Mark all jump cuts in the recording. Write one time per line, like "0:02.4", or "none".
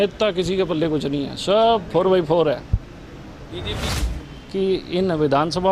0:04.0